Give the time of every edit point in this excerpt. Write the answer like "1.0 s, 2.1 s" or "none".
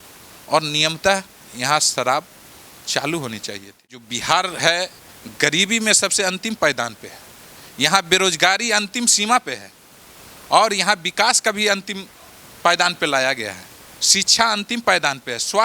4.1 s